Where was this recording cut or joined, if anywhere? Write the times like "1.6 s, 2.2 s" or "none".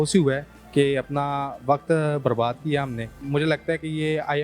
3.2 s